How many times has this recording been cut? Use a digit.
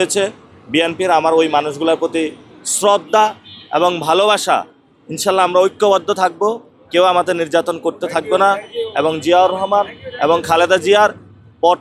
0